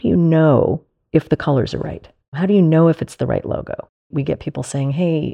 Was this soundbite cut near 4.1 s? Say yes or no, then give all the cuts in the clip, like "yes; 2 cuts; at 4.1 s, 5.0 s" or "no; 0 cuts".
yes; 3 cuts; at 0.9 s, 2.3 s, 4.1 s